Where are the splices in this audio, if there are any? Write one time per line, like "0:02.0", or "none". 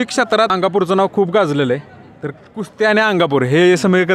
none